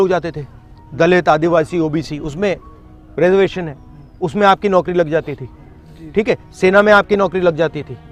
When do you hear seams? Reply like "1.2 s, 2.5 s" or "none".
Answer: none